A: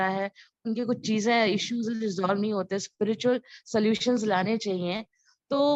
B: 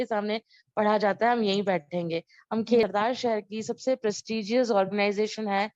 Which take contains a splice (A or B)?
B